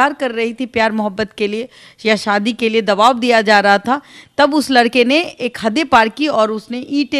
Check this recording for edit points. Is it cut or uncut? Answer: uncut